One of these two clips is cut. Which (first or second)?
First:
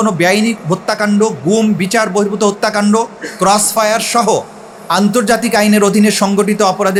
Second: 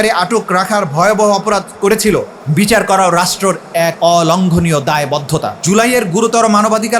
second